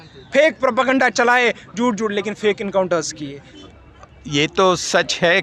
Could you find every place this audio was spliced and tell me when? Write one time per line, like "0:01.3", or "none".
0:03.4